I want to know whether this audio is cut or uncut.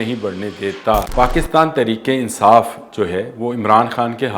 cut